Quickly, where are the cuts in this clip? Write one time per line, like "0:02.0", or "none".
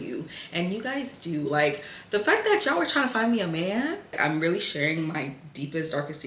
0:04.2

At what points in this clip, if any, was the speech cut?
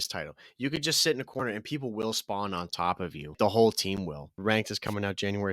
0:03.3
0:04.4

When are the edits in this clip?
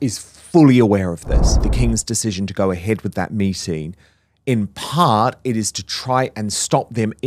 0:01.6

